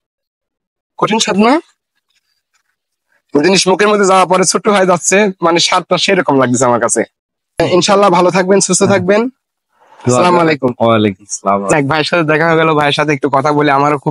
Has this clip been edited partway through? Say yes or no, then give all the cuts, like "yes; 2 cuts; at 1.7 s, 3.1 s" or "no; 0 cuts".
yes; 1 cut; at 7.4 s